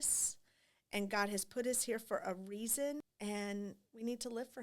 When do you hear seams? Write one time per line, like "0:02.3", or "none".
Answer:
0:03.1